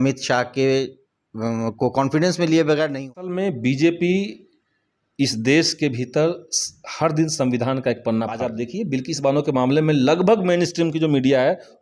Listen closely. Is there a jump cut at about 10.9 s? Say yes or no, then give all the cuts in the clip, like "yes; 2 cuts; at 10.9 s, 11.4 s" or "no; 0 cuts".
no; 2 cuts; at 3.2 s, 8.4 s